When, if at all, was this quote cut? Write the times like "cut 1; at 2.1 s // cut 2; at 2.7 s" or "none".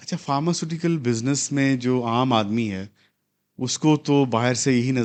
none